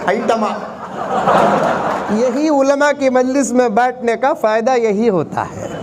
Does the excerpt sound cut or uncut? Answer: cut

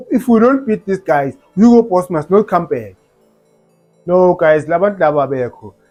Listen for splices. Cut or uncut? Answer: uncut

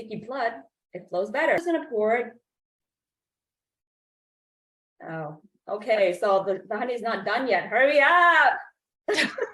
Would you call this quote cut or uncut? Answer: cut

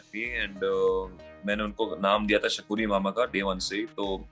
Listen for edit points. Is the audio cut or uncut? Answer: uncut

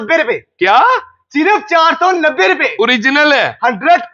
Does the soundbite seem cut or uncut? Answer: uncut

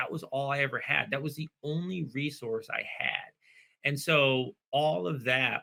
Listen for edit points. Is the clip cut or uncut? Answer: uncut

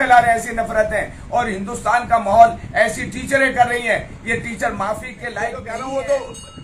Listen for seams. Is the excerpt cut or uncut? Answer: cut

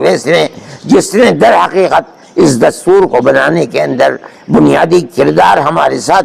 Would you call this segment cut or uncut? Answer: uncut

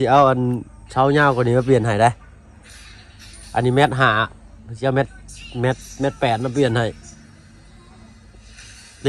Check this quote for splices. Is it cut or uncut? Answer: uncut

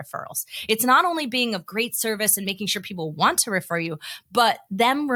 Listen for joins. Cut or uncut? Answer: uncut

